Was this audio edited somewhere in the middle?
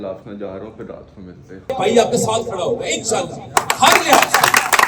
yes; 1 cut; at 1.7 s

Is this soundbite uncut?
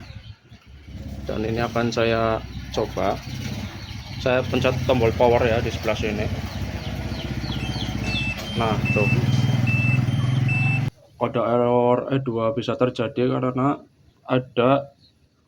no; 1 cut; at 10.9 s

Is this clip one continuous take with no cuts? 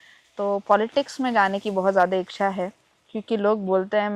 yes; 0 cuts

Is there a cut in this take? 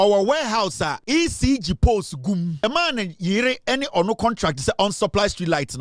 yes; 2 cuts; at 1.0 s, 2.6 s

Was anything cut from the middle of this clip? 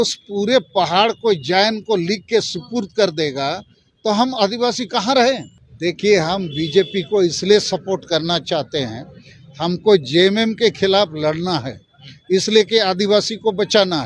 yes; 1 cut; at 5.7 s

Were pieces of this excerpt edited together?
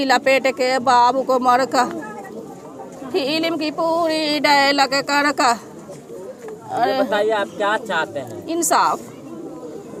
no; 0 cuts

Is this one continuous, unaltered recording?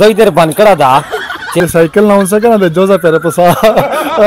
no; 1 cut; at 1.6 s

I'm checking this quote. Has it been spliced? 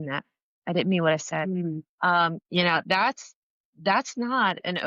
no; 0 cuts

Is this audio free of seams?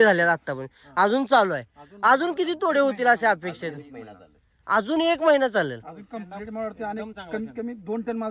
yes; 0 cuts

